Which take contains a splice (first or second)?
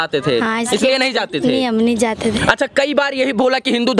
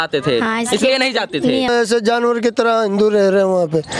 second